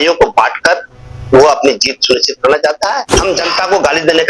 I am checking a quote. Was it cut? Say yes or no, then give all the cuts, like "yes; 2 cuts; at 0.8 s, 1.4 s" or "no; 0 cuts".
yes; 1 cut; at 3.1 s